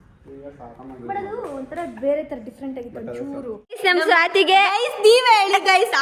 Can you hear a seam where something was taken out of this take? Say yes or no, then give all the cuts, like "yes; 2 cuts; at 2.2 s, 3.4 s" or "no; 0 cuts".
yes; 1 cut; at 3.8 s